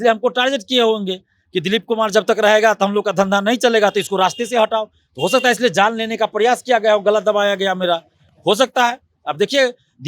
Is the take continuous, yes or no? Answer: yes